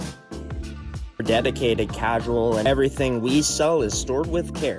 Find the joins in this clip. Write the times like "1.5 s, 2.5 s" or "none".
2.6 s